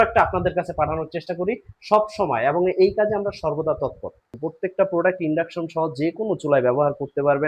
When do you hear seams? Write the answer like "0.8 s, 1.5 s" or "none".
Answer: 4.4 s